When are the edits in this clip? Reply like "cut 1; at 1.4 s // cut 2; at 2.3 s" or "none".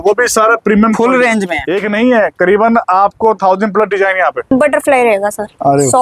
cut 1; at 1.6 s // cut 2; at 4.5 s